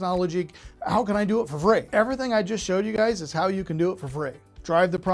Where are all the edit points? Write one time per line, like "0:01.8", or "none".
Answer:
0:01.9

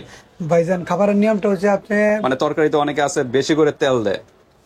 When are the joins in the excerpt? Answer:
0:02.2

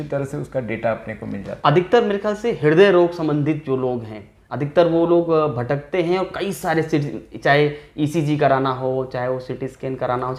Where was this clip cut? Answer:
none

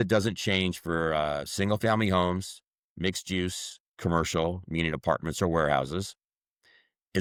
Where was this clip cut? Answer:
none

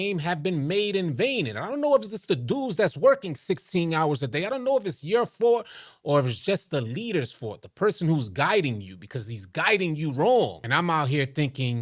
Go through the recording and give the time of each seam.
0:10.6

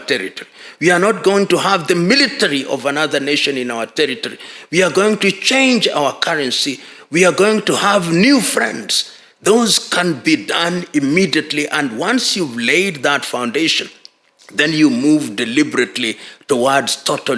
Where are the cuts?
none

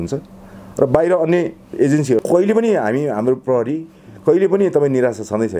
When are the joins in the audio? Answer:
0:02.2

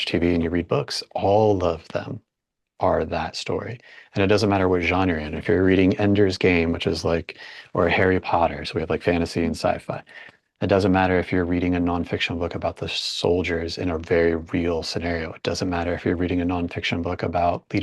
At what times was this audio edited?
none

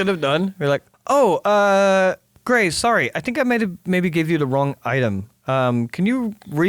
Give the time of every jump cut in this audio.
0:00.9
0:02.3

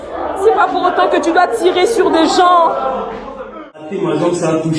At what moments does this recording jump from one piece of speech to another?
0:03.7

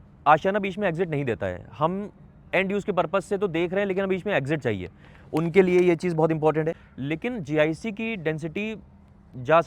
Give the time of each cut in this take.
0:06.8

